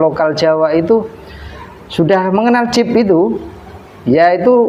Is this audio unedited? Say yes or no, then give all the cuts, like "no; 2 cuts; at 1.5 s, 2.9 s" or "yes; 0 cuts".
yes; 0 cuts